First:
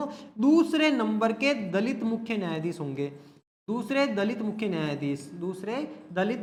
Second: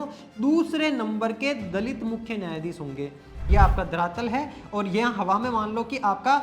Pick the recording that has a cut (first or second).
second